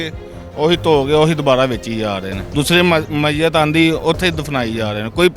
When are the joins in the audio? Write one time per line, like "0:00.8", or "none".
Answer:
0:02.4